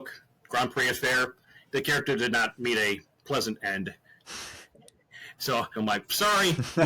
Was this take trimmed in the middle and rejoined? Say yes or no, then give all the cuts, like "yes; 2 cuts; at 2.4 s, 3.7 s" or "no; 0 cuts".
yes; 2 cuts; at 1.5 s, 5.7 s